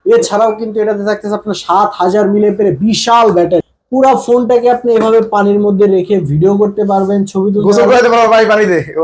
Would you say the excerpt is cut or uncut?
cut